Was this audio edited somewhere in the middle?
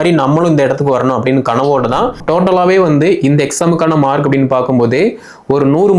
yes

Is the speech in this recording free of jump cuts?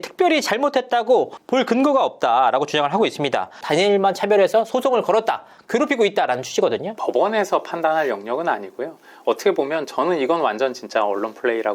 no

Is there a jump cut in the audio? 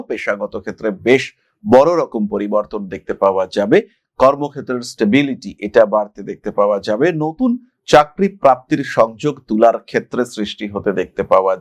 no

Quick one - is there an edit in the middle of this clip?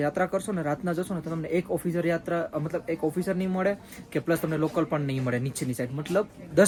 no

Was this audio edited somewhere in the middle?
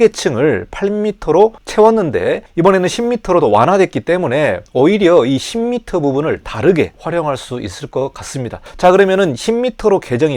yes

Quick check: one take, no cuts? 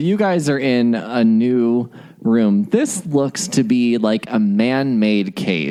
yes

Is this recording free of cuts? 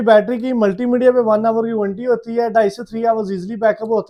yes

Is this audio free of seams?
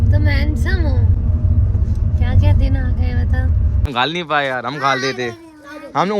no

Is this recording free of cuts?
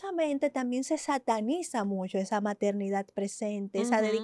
yes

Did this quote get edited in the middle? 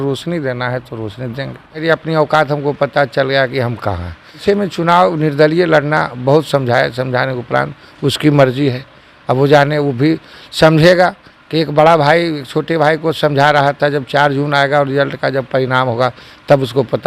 yes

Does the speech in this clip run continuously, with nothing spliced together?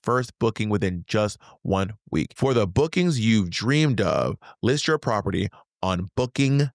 no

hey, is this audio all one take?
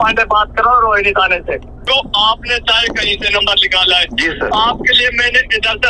no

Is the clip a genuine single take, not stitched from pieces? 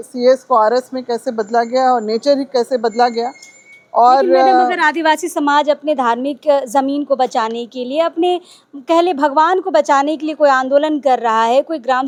yes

